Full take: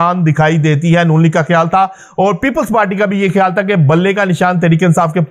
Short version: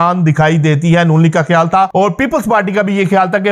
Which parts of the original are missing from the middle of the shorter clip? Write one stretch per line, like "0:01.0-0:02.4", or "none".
0:01.9-0:02.1

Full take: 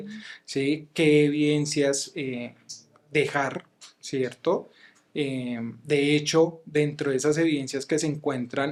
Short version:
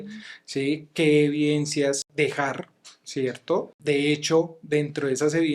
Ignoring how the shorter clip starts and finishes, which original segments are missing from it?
0:02.1-0:03.0
0:04.7-0:05.8

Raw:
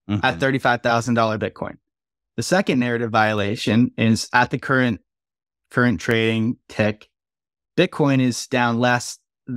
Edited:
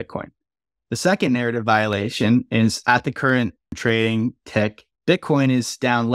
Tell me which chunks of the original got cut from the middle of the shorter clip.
0:05.2-0:06.0
0:07.1-0:07.6

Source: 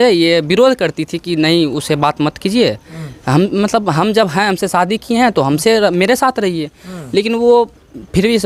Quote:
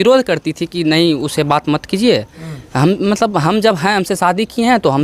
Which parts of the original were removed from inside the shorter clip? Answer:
none

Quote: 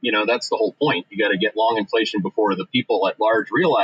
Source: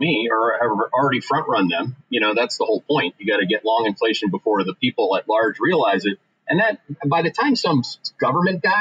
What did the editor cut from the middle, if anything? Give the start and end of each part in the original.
none

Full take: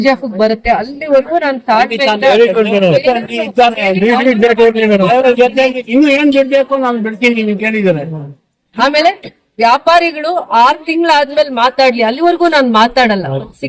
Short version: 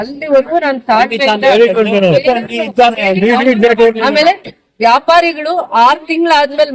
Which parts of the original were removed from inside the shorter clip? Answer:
0:04.8-0:08.8

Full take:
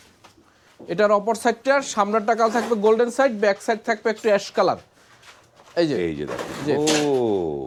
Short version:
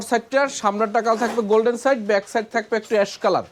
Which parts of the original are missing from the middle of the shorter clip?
none

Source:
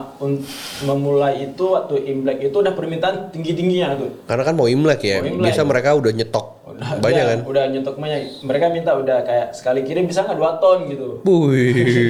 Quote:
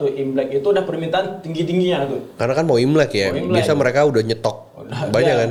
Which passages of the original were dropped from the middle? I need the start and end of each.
none

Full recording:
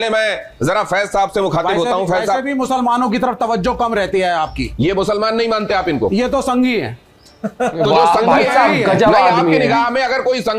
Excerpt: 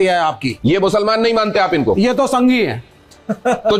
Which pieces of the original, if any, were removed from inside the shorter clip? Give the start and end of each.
none

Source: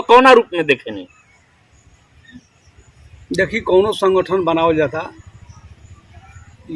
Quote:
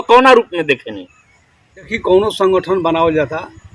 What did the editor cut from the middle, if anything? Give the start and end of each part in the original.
0:01.9-0:03.6

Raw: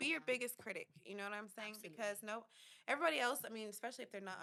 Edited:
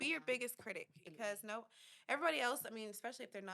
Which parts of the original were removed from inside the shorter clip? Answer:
0:01.0-0:01.8

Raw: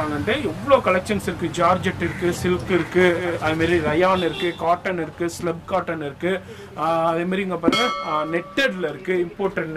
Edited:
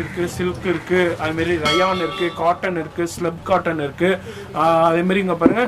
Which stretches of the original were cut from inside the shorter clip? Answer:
0:03.2-0:03.4

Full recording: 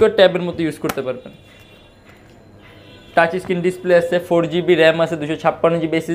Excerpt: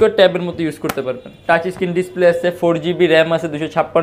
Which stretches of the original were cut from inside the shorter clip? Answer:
0:01.3-0:03.0

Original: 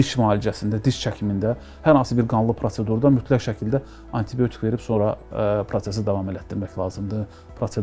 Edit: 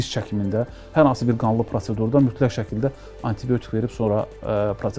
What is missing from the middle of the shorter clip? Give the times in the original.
none

